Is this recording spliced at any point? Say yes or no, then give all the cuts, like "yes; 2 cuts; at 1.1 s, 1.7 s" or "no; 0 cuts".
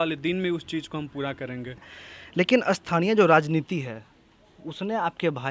yes; 1 cut; at 2.0 s